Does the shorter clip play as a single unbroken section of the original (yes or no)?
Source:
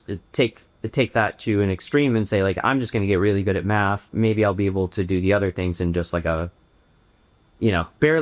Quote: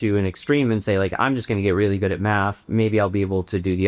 yes